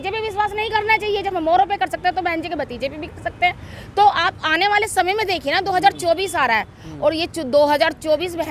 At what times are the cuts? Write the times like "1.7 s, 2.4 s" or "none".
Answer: none